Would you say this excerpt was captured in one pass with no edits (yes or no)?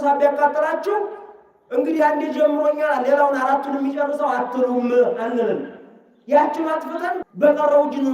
no